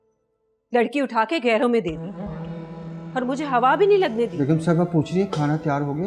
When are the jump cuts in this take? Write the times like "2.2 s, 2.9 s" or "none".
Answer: 4.4 s